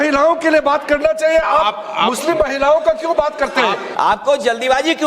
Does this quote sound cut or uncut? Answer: cut